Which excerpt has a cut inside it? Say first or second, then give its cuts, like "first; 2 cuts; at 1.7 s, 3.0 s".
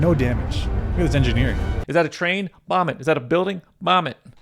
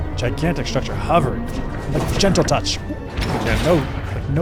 first; 1 cut; at 1.7 s